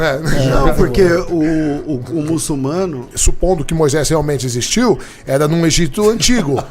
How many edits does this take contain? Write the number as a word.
one